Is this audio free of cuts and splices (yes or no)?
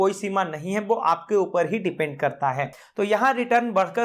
no